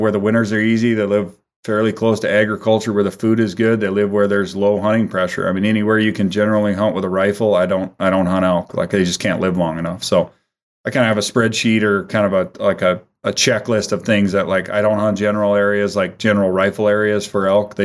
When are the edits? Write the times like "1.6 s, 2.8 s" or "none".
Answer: none